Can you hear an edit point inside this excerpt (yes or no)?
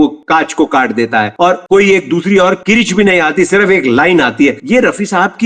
no